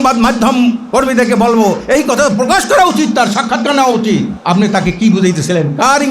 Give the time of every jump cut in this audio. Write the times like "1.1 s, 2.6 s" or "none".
4.3 s